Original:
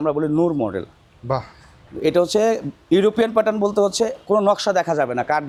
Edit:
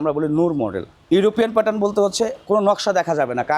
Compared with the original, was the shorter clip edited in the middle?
yes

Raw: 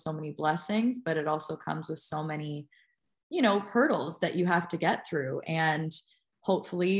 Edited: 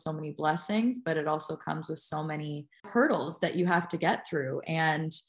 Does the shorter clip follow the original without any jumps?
no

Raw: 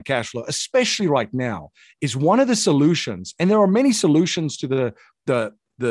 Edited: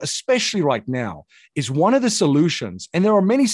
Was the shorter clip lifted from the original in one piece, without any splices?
yes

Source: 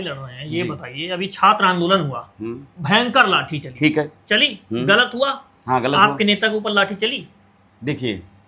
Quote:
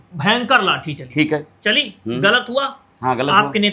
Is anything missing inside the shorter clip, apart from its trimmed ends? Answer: no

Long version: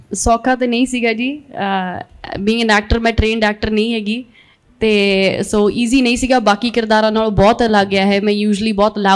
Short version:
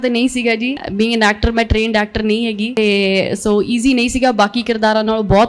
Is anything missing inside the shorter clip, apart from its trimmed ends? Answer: yes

